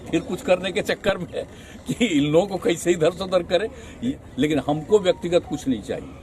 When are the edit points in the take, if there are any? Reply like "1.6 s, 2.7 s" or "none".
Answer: 4.0 s